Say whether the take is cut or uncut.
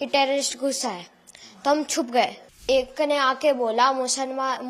cut